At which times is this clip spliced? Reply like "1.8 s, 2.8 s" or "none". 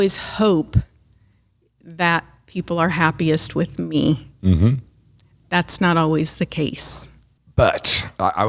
none